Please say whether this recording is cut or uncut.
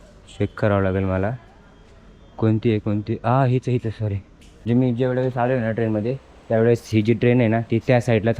cut